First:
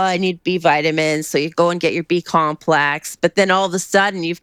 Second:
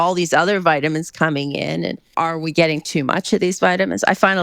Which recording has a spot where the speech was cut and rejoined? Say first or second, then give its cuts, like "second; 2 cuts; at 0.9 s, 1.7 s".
second; 1 cut; at 2.0 s